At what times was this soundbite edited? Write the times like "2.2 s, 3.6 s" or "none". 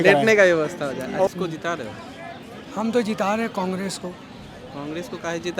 1.3 s